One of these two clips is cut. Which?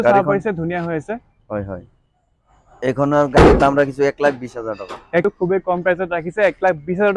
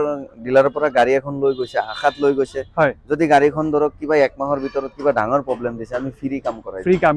first; 2 cuts; at 2.8 s, 5.2 s

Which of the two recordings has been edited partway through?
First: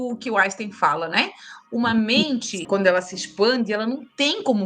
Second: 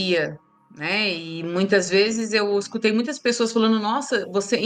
first; 1 cut; at 2.6 s

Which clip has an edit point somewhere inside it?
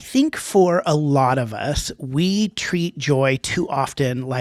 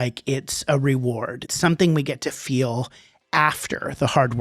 second; 1 cut; at 1.5 s

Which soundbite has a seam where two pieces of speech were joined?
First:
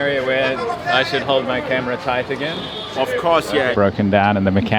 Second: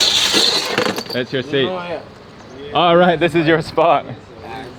first; 1 cut; at 3.7 s

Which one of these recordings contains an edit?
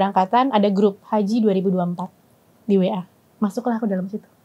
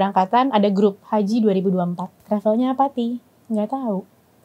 second; 1 cut; at 2.1 s

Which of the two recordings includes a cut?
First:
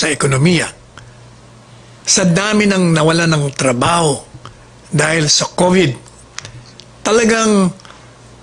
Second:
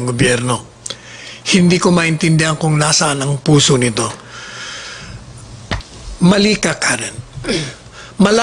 second; 1 cut; at 5.8 s

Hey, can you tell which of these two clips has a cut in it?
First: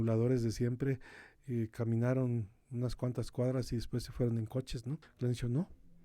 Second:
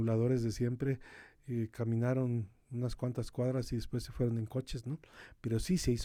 first; 1 cut; at 5.1 s

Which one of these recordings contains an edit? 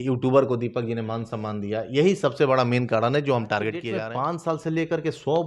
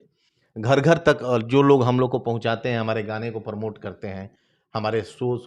first; 1 cut; at 3.9 s

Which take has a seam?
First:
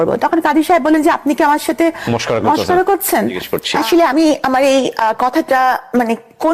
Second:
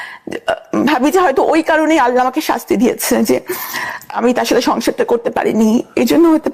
first; 1 cut; at 3.5 s

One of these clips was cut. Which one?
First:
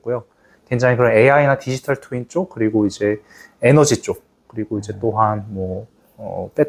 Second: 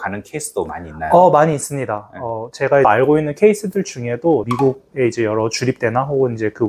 second; 2 cuts; at 2.8 s, 4.5 s

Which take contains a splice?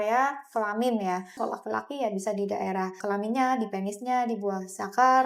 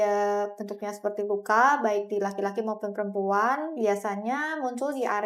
first; 2 cuts; at 1.4 s, 3.0 s

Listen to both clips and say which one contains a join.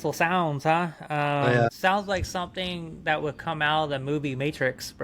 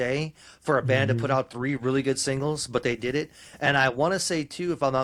first; 1 cut; at 1.7 s

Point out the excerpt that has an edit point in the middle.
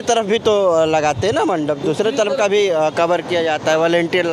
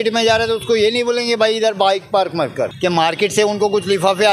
second; 1 cut; at 2.7 s

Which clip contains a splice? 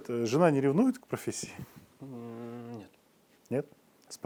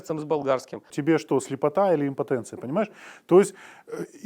second; 1 cut; at 0.9 s

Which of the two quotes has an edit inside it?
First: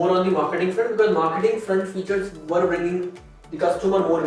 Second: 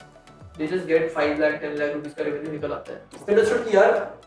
second; 1 cut; at 3.3 s

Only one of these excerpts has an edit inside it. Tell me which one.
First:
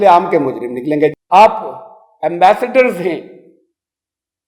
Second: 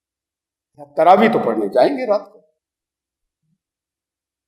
first; 1 cut; at 1.1 s

